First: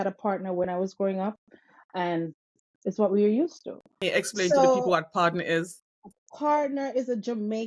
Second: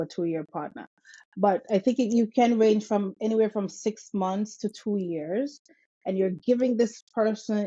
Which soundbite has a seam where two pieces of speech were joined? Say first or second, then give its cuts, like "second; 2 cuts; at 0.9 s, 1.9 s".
first; 1 cut; at 3.9 s